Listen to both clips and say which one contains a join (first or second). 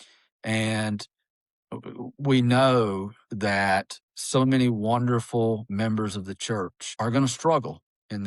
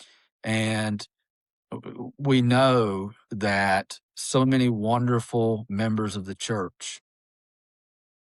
first